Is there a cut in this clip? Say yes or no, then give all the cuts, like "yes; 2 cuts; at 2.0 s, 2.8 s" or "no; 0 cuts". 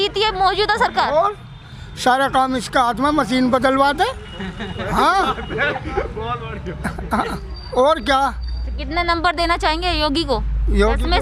no; 0 cuts